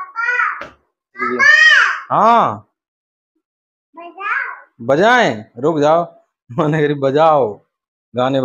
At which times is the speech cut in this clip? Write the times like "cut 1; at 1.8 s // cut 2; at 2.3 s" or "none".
cut 1; at 1.2 s